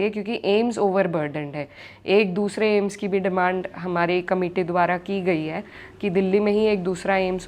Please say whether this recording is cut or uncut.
uncut